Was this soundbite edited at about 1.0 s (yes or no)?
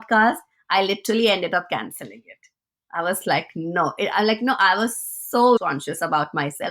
no